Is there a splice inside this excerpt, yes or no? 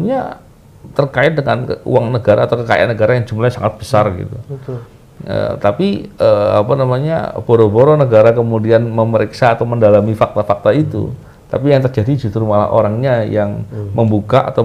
no